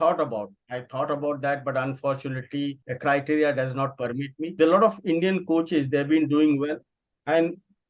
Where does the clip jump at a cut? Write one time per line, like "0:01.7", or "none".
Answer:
0:02.9
0:04.4